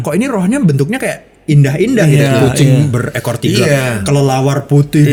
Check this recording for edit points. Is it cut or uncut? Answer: uncut